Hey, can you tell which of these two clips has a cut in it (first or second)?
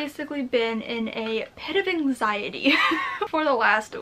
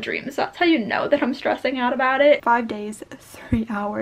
second